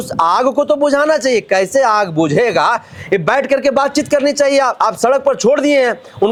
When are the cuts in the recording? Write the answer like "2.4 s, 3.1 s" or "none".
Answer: none